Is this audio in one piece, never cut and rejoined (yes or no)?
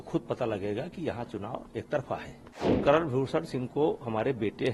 no